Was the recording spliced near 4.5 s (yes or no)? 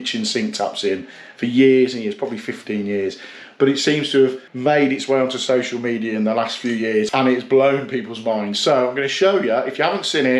yes